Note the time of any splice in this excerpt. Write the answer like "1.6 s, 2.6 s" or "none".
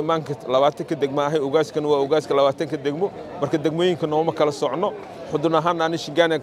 none